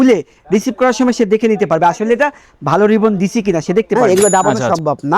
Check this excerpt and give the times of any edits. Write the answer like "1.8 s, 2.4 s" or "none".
3.9 s